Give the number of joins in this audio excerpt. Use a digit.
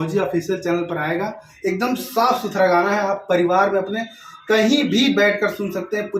1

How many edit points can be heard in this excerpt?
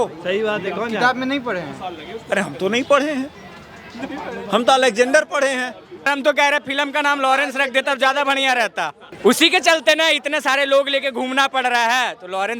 2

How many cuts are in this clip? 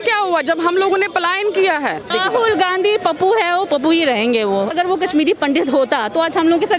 2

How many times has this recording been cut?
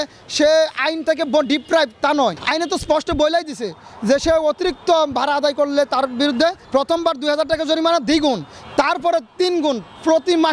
2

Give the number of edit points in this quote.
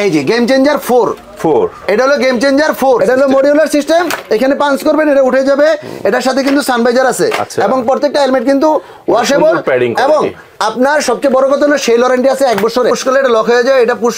2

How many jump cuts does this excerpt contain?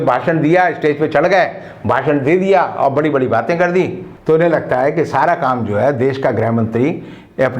1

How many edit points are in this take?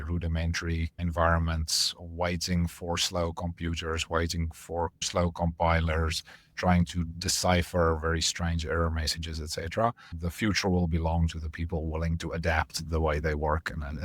3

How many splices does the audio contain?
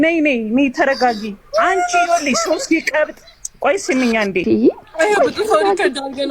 1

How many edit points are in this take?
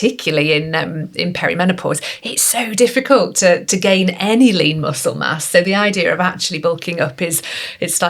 0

